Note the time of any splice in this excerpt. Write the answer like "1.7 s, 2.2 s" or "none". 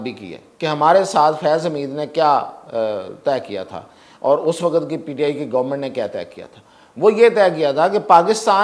none